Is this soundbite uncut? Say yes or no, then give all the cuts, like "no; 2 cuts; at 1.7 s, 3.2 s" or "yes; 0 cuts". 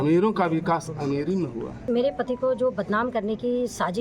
no; 1 cut; at 1.9 s